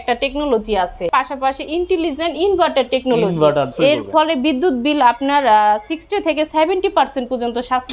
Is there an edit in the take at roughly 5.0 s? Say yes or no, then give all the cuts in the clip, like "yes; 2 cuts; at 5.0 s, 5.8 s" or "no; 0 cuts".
no; 2 cuts; at 1.0 s, 3.7 s